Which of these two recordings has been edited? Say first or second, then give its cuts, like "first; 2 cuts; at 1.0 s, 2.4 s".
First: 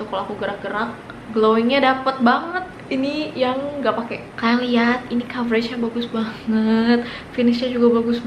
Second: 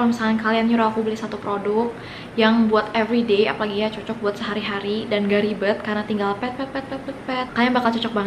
first; 2 cuts; at 1.1 s, 4.2 s